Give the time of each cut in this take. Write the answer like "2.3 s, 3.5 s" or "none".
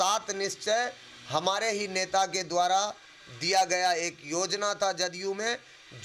none